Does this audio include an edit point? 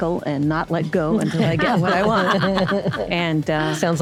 no; 0 cuts

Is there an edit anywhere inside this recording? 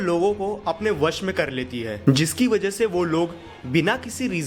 no; 0 cuts

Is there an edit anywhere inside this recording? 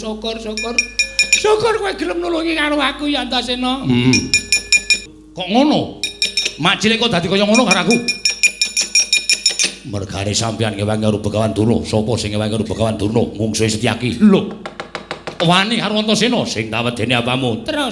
yes; 1 cut; at 5.0 s

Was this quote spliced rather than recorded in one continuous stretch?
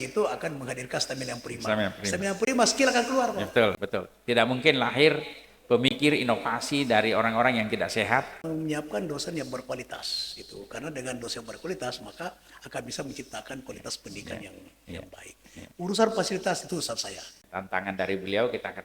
yes; 3 cuts; at 3.8 s, 8.4 s, 17.4 s

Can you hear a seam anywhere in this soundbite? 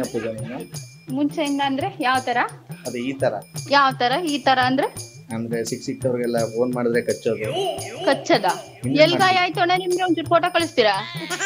no; 0 cuts

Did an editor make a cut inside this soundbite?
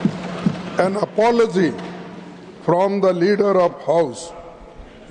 no; 0 cuts

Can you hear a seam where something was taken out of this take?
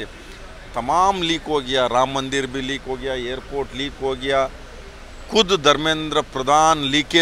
no; 0 cuts

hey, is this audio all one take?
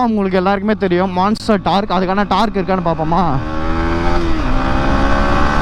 yes; 0 cuts

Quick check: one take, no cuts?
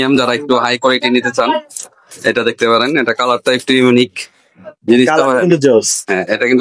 yes; 0 cuts

